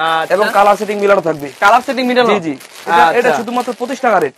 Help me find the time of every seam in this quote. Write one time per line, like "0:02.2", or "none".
none